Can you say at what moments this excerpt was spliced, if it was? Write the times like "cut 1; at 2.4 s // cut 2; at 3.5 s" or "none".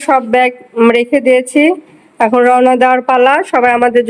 none